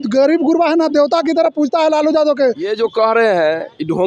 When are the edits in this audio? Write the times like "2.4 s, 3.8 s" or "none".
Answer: 2.7 s